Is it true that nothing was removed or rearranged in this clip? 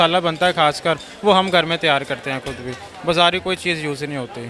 yes; 0 cuts

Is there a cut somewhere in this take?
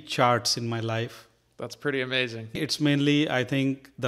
yes; 1 cut; at 2.6 s

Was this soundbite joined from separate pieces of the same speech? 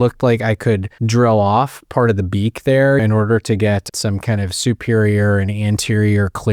yes; 3 cuts; at 0.9 s, 3.0 s, 3.9 s

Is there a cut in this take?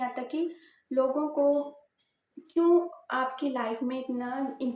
no; 0 cuts

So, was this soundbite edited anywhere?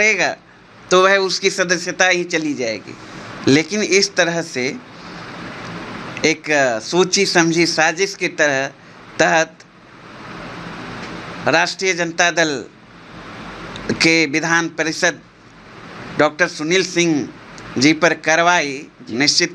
no; 0 cuts

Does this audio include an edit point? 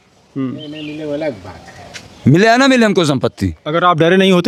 no; 0 cuts

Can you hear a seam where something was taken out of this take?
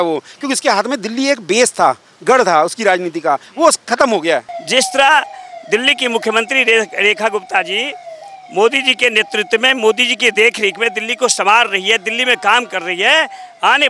yes; 1 cut; at 4.6 s

